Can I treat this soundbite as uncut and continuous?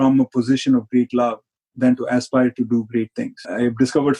yes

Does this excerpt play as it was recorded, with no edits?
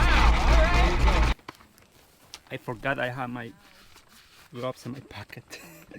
no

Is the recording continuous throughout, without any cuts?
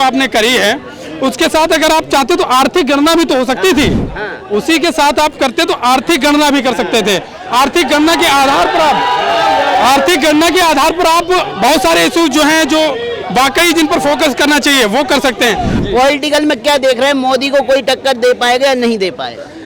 no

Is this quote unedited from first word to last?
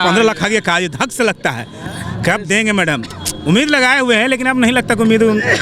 yes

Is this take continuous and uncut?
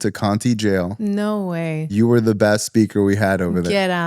yes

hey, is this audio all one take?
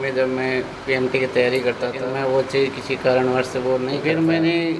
no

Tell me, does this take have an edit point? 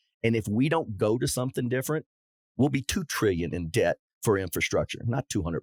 no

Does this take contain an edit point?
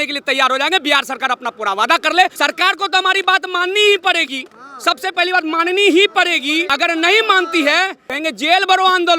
yes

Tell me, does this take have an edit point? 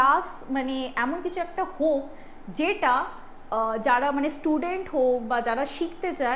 no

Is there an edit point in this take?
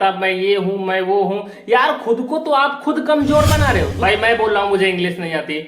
yes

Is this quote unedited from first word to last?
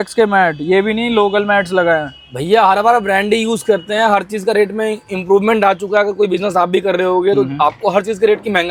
yes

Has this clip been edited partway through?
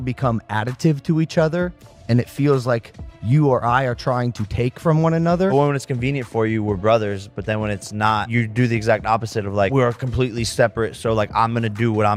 no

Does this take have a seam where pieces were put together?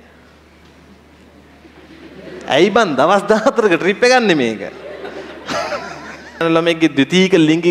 yes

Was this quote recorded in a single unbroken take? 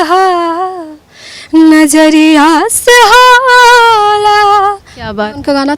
yes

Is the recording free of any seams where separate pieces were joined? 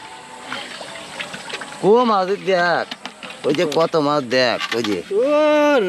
yes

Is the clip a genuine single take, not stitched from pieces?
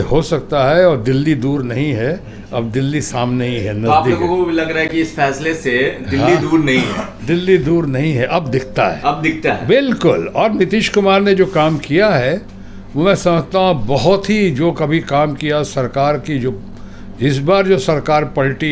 yes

